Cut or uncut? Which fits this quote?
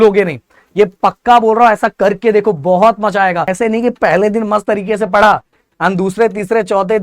cut